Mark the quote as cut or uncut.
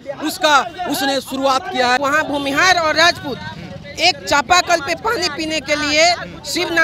cut